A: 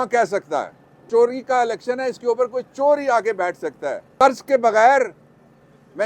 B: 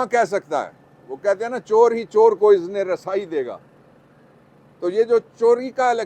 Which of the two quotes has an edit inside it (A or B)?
A